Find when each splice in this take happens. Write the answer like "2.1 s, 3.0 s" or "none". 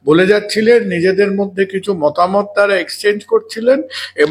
none